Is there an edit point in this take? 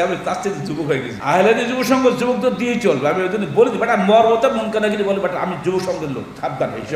yes; 1 cut; at 1.1 s

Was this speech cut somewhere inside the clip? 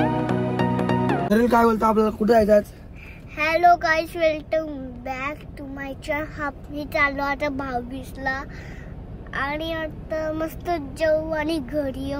yes; 1 cut; at 1.2 s

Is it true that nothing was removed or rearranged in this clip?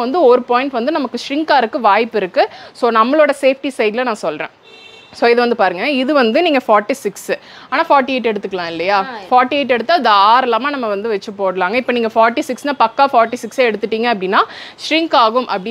yes; 0 cuts

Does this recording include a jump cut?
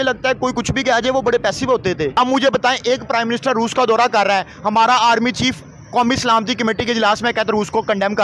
yes; 1 cut; at 2.1 s

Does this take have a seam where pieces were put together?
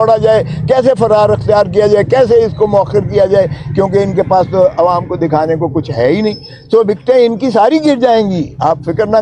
no; 0 cuts

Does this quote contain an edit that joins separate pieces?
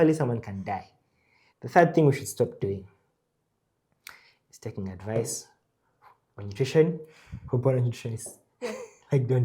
yes; 1 cut; at 1.4 s

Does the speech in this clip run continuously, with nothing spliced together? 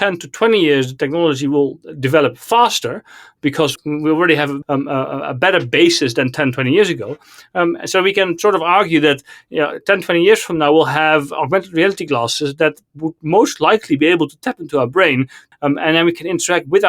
yes; 0 cuts

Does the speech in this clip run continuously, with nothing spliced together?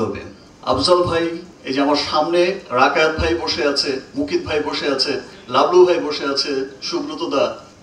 yes; 0 cuts

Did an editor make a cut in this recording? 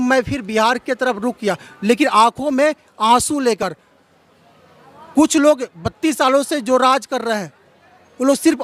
no; 0 cuts

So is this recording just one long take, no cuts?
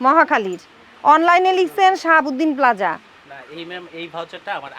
yes; 0 cuts

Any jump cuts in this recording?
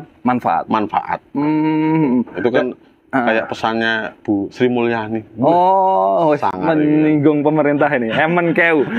no; 0 cuts

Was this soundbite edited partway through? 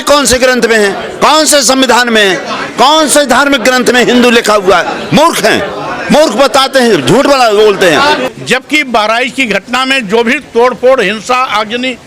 yes; 1 cut; at 8.3 s

